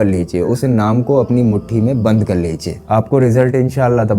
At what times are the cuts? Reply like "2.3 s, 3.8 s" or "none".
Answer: 2.7 s